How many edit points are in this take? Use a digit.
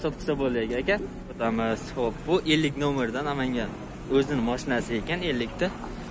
1